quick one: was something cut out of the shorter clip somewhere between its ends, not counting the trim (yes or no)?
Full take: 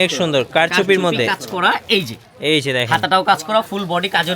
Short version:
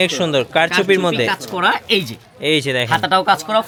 no